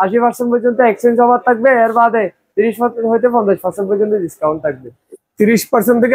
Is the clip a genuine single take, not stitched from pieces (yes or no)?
yes